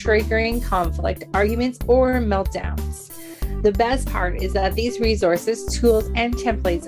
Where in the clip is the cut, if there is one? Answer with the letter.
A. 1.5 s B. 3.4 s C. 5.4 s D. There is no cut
D